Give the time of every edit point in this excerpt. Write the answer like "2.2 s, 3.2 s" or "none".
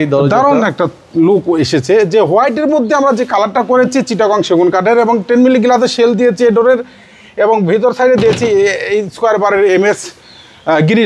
none